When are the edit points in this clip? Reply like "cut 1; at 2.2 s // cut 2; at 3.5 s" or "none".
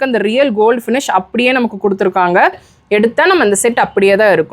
cut 1; at 2.7 s